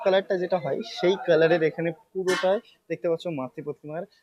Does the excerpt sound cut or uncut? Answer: uncut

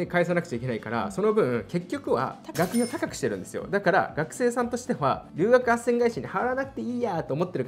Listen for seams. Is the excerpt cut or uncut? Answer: uncut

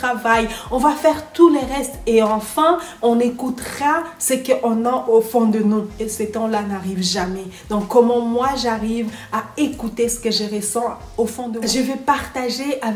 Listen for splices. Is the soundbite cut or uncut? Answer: cut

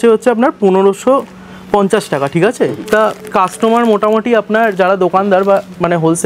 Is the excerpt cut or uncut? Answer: uncut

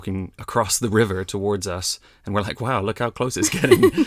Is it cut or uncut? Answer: uncut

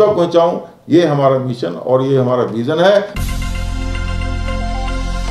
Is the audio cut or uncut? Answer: cut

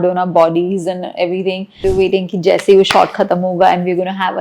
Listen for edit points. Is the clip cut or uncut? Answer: cut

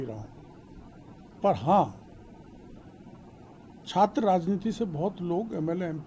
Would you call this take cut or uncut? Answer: uncut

